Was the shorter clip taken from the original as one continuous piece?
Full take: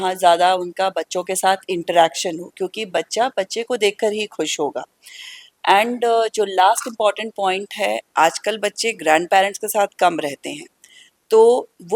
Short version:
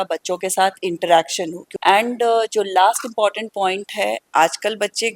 no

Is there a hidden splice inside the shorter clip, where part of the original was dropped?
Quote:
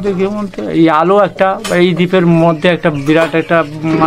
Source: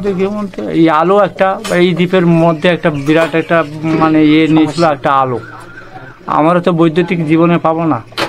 no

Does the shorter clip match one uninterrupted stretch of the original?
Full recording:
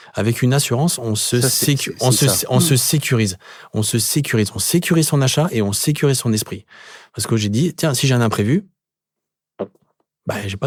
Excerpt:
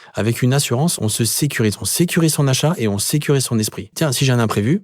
no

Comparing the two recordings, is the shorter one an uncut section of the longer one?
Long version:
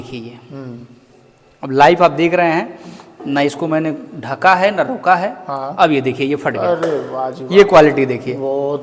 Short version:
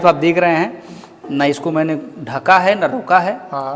yes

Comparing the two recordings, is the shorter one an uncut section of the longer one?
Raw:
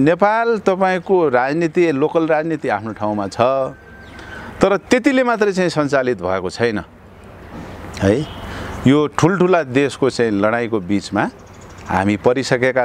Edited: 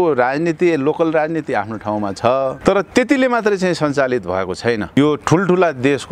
no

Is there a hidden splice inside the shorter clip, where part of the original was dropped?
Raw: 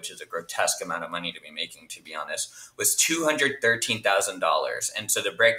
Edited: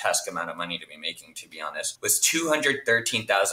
yes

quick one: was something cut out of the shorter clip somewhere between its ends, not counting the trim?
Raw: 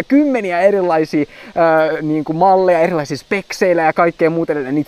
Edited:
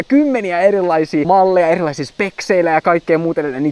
yes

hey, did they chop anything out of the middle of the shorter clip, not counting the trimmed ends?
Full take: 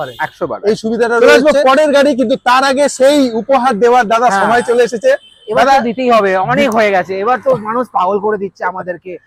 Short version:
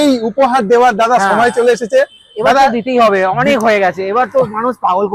no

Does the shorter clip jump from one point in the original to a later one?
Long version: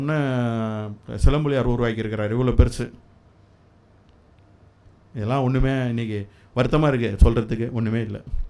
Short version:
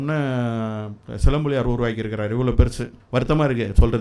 yes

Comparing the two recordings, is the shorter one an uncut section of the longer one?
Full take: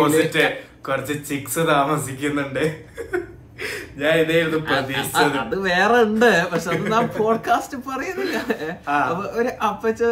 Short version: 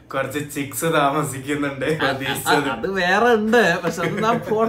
no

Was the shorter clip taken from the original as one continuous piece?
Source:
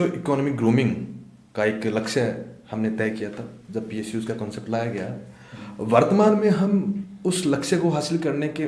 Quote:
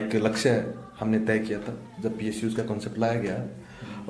yes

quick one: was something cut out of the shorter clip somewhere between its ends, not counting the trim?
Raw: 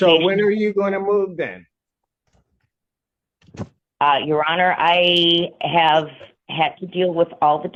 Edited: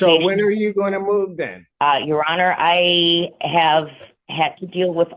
yes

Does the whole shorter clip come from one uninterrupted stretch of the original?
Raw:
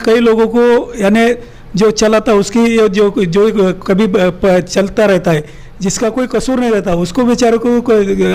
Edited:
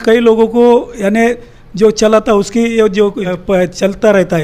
no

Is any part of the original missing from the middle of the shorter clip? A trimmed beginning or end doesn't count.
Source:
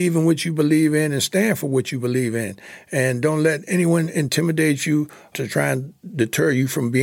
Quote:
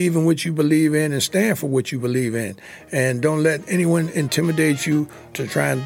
no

